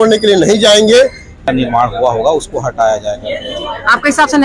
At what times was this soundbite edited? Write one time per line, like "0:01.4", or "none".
0:01.5